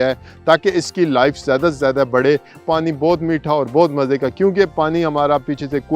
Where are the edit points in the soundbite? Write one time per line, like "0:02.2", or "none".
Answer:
0:02.6